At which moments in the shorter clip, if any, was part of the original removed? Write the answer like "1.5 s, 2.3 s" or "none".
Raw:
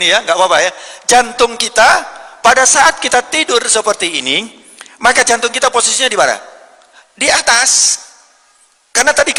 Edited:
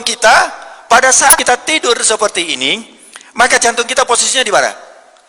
1.4 s